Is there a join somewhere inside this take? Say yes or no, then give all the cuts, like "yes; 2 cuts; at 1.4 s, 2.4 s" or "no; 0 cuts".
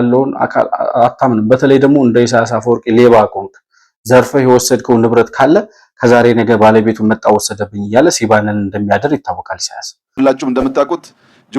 yes; 1 cut; at 10.1 s